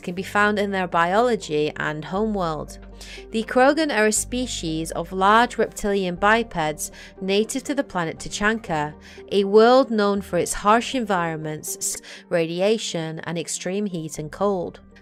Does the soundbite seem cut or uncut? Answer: uncut